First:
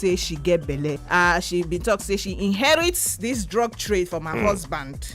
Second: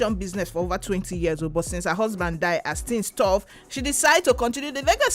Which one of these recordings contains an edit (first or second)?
first